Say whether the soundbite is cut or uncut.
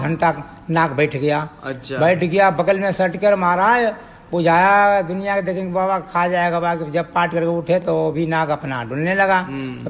uncut